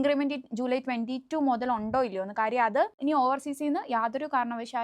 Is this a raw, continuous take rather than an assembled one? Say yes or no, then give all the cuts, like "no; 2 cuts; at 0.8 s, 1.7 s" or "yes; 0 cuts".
no; 1 cut; at 3.0 s